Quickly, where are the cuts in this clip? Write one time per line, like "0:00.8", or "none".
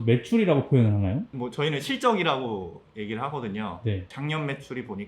0:04.1